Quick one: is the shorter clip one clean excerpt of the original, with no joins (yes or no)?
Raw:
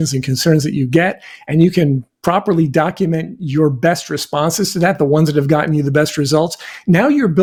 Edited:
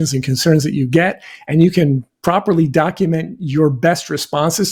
yes